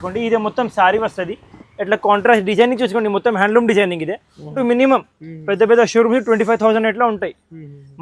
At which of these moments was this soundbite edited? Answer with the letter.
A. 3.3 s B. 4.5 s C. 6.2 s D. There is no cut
B